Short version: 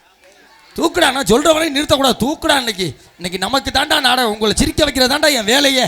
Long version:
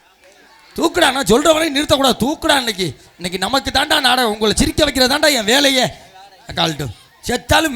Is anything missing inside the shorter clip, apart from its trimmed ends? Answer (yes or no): no